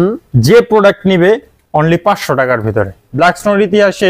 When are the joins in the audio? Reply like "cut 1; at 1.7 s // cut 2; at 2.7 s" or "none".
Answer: cut 1; at 3.0 s